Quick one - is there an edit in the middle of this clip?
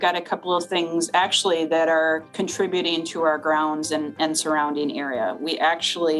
yes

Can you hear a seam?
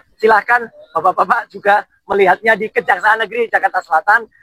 no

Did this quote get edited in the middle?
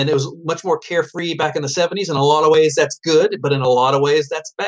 no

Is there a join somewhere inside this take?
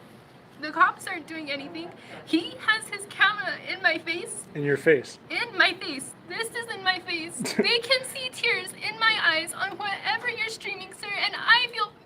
yes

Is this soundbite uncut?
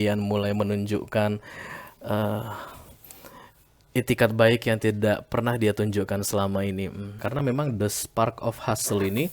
no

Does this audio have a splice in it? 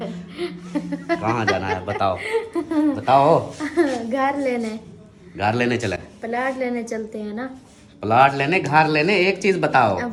no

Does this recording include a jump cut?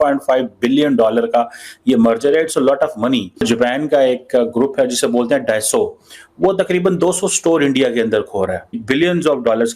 yes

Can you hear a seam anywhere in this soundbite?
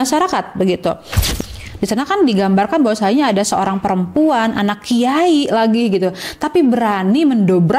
yes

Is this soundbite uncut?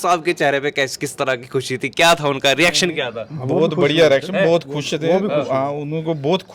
yes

